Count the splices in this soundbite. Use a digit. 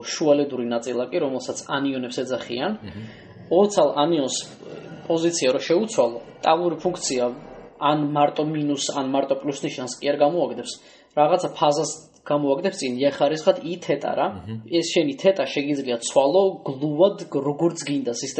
1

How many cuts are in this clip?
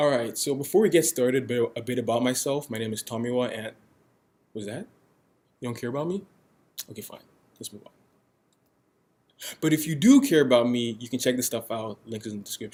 0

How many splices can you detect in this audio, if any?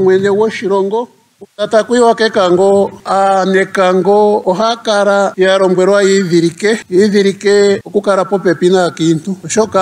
1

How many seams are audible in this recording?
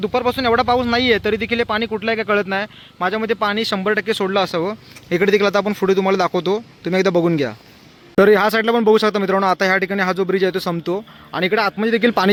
0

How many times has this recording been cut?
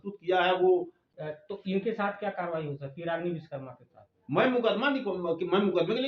1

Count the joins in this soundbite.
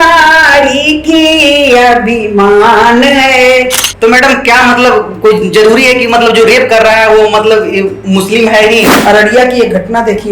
2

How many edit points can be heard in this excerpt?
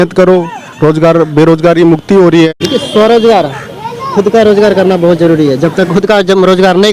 1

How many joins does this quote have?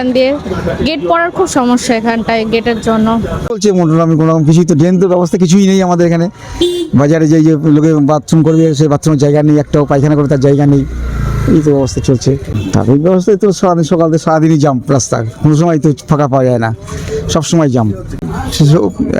3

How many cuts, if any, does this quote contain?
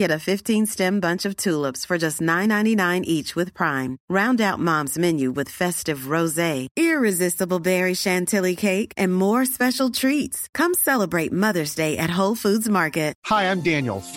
1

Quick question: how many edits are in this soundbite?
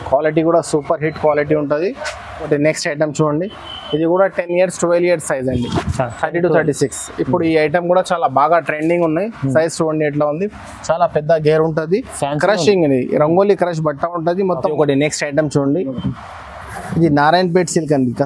2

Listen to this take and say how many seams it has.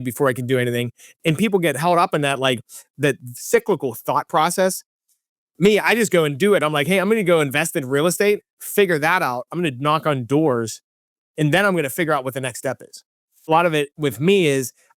1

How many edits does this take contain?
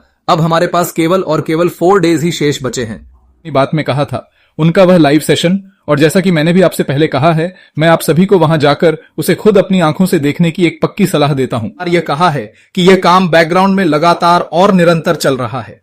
2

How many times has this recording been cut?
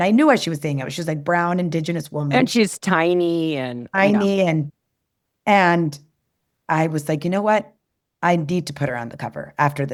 0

